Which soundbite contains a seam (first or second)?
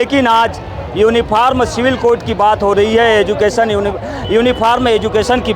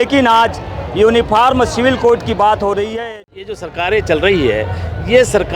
second